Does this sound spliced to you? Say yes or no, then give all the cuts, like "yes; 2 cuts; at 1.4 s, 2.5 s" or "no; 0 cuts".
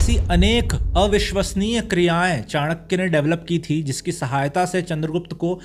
no; 0 cuts